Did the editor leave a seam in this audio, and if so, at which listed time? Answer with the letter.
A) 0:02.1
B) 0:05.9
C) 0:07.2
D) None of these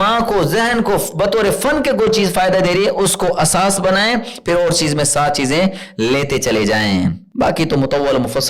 C